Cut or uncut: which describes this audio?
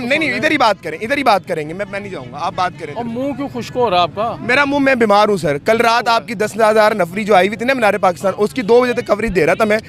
uncut